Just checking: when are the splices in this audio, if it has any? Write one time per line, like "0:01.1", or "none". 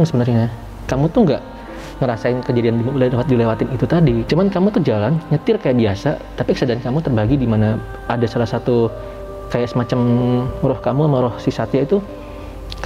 0:04.3